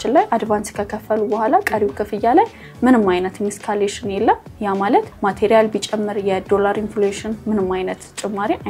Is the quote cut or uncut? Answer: uncut